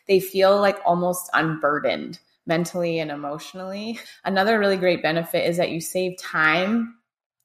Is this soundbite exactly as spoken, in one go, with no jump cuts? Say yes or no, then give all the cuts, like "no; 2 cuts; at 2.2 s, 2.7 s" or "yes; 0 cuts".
no; 1 cut; at 4.0 s